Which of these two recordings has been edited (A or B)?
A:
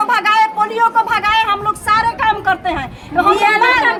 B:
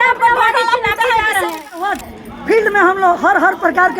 B